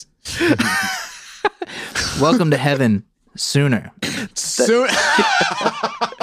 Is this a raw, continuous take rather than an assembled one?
no; 1 cut; at 4.0 s

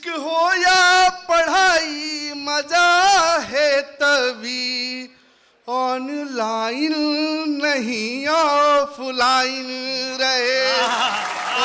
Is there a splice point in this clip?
no; 0 cuts

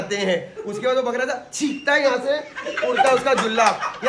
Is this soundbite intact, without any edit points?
yes; 0 cuts

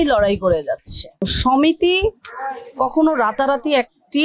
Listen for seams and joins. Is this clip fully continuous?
no; 1 cut; at 1.3 s

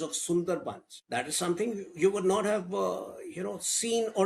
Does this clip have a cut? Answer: yes; 1 cut; at 0.9 s

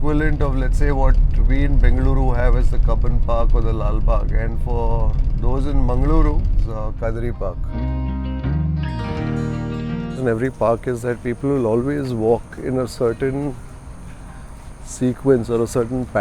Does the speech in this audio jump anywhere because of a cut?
yes; 3 cuts; at 6.6 s, 7.6 s, 10.2 s

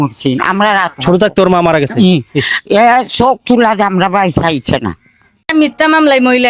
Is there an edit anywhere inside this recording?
yes; 1 cut; at 5.4 s

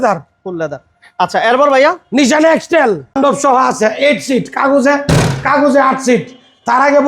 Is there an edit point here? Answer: yes; 1 cut; at 3.1 s

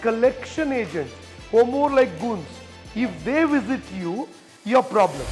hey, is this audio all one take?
yes; 0 cuts

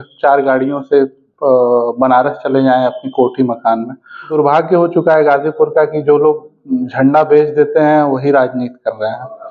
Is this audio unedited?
no; 1 cut; at 4.3 s

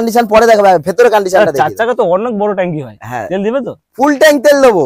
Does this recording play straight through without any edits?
yes; 0 cuts

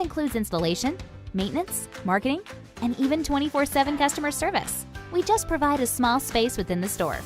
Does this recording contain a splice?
yes; 1 cut; at 4.1 s

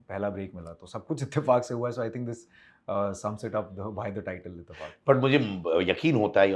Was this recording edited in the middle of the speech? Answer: no; 0 cuts

